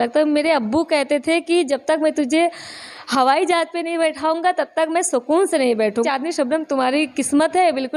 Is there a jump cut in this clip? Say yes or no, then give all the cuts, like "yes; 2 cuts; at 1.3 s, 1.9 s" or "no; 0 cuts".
yes; 1 cut; at 6.0 s